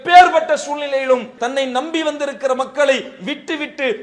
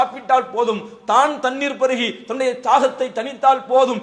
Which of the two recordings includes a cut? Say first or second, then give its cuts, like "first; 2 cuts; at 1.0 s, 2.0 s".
first; 1 cut; at 1.3 s